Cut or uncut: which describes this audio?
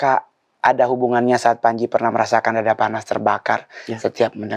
uncut